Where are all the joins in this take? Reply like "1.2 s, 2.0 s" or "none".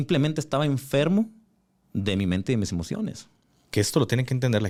none